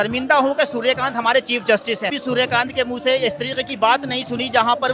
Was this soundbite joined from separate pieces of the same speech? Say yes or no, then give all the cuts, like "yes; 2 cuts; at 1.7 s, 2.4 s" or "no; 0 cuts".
yes; 1 cut; at 2.1 s